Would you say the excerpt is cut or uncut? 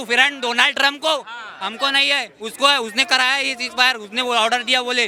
uncut